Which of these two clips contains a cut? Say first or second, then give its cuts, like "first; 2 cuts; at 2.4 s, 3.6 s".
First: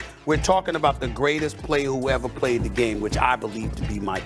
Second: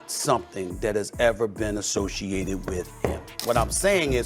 second; 1 cut; at 3.3 s